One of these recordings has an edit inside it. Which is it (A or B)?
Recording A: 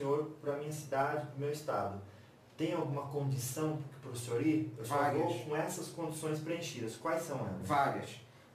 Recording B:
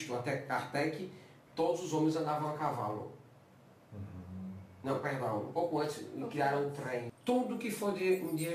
B